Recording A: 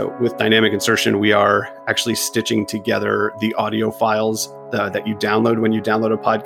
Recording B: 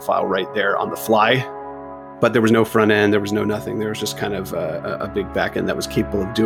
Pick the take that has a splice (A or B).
B